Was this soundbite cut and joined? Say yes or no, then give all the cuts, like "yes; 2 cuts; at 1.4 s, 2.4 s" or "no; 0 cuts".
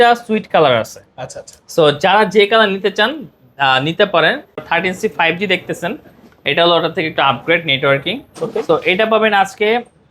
yes; 1 cut; at 4.7 s